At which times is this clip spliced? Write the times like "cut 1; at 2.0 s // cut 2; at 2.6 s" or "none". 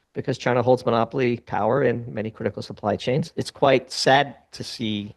cut 1; at 3.3 s